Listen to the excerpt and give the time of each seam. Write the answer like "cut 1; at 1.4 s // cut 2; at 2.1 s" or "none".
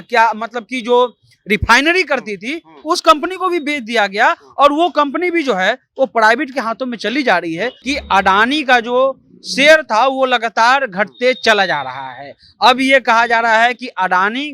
cut 1; at 7.8 s